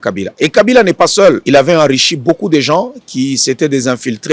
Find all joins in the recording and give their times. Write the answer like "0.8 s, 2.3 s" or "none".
1.4 s